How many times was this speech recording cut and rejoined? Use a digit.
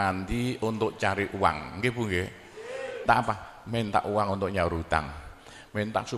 1